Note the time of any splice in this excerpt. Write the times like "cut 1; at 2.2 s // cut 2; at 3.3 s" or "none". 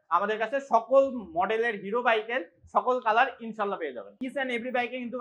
cut 1; at 4.1 s